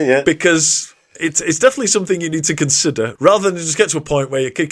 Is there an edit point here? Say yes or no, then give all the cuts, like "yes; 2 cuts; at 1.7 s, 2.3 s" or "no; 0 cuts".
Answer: yes; 2 cuts; at 1.2 s, 3.1 s